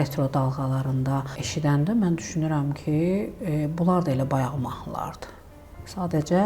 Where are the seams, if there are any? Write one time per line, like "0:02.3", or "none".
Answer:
0:01.4